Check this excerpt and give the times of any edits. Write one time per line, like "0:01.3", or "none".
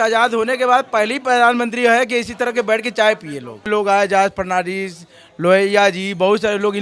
0:03.7